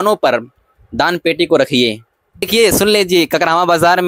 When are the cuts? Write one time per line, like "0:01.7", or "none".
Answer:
0:02.5